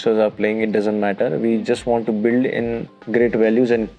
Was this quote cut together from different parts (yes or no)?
yes